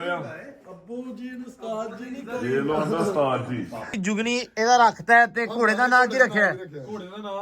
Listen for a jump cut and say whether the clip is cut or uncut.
cut